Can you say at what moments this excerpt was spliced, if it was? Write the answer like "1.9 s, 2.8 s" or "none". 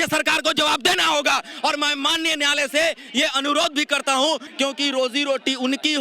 4.5 s